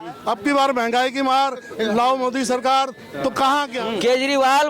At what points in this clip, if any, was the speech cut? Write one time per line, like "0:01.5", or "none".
0:03.8